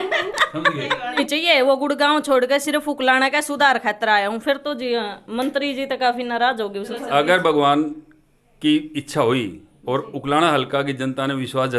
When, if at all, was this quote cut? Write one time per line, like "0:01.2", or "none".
0:01.2
0:06.9